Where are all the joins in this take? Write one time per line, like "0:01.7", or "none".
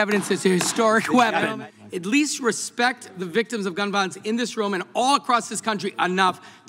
0:01.5